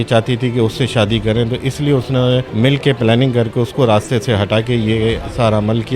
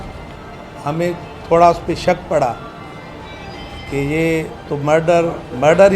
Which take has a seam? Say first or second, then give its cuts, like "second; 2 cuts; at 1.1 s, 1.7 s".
first; 1 cut; at 2.5 s